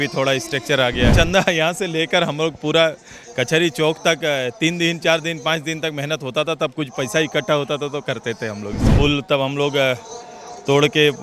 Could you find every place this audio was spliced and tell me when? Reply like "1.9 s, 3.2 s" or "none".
1.1 s, 8.8 s